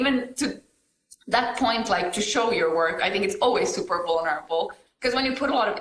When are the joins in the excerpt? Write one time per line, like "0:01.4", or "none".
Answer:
0:04.8